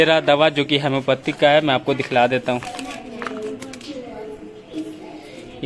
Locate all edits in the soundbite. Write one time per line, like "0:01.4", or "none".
none